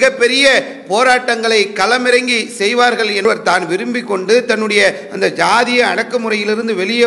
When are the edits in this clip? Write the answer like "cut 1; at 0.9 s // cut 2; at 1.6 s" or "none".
cut 1; at 3.2 s